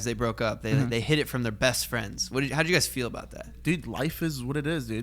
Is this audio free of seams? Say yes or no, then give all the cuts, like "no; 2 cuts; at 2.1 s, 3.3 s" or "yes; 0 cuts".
no; 1 cut; at 3.6 s